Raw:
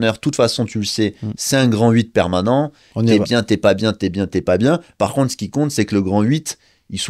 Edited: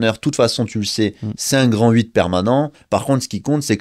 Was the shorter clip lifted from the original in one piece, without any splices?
no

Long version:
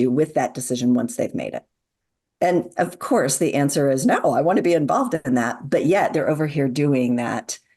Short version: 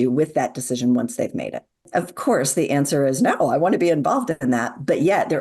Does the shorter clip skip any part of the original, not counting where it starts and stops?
yes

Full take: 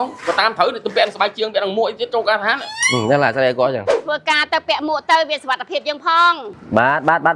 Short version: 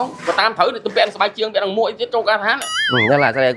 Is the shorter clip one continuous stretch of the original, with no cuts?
yes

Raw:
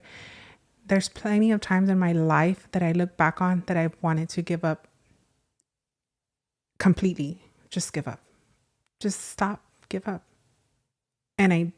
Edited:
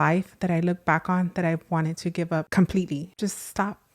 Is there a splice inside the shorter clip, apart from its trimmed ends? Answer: yes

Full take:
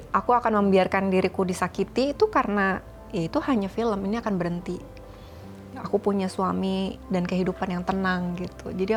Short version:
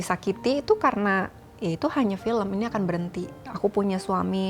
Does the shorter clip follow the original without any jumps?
no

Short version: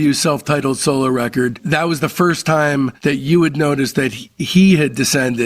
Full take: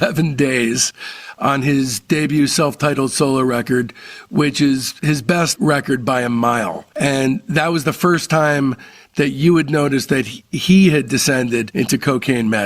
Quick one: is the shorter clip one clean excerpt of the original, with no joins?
no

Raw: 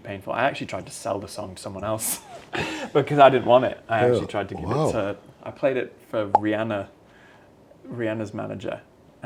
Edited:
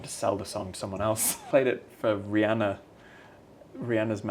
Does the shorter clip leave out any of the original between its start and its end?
yes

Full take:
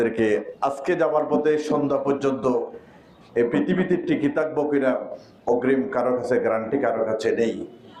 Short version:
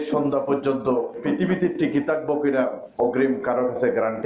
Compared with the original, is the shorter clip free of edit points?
no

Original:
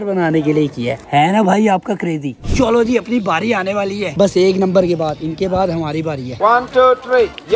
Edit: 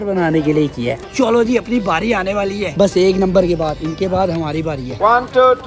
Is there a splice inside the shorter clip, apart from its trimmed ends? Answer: yes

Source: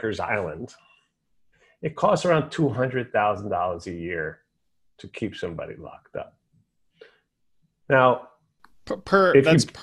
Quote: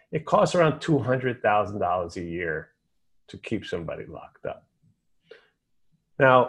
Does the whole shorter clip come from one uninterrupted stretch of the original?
yes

